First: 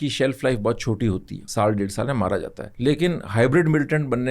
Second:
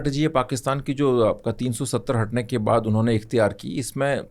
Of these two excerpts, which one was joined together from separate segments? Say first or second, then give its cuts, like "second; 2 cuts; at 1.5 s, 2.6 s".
first; 2 cuts; at 1.4 s, 2.6 s